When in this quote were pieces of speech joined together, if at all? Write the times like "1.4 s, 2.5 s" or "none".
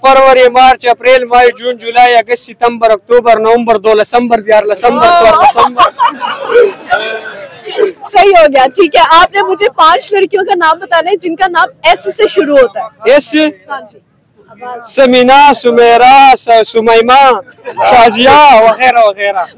none